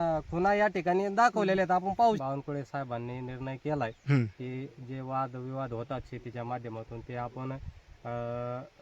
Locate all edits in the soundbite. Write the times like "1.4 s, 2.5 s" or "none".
2.2 s